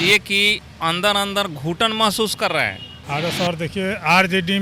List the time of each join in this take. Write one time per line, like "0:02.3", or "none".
0:02.9